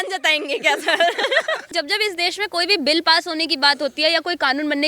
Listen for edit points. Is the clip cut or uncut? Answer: cut